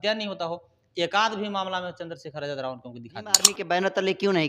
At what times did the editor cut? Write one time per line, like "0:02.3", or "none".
0:03.5